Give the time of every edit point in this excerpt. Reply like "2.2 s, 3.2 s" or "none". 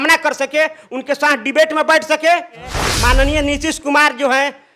2.8 s